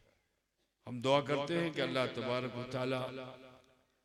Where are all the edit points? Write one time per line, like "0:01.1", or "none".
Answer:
none